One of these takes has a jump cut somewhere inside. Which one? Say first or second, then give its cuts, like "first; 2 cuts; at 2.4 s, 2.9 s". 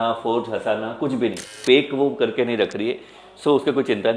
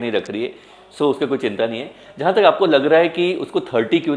first; 1 cut; at 1.5 s